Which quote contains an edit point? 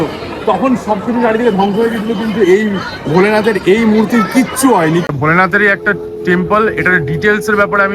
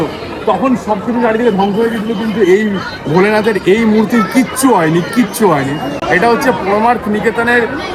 first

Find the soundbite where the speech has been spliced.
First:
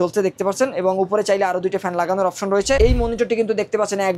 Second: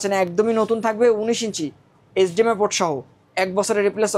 first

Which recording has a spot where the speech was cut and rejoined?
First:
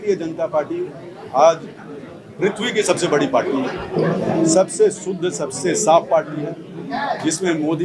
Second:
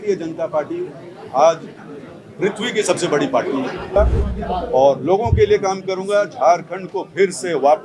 second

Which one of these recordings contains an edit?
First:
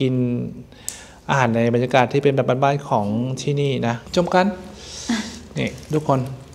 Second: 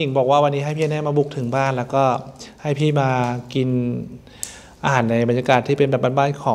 first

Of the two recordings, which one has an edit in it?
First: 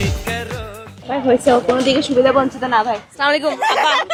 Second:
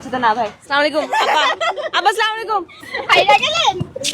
second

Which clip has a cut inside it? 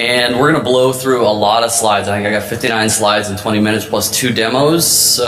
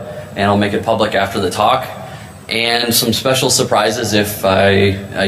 first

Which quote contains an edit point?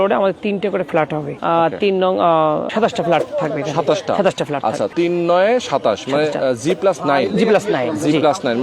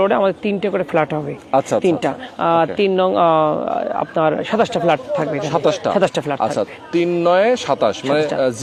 first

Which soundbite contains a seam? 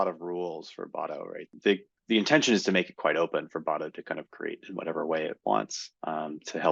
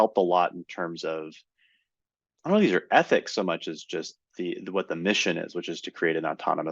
first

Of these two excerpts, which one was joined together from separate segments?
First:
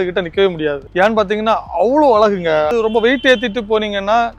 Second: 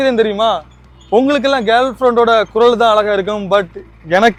first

